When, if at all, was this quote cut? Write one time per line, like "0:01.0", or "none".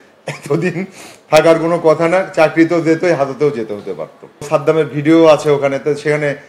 0:04.5